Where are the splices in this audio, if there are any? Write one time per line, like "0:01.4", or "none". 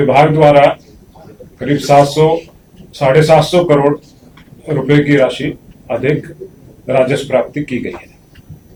none